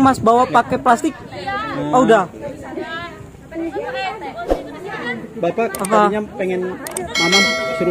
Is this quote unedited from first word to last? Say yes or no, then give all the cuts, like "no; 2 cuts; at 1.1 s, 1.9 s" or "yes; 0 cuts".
yes; 0 cuts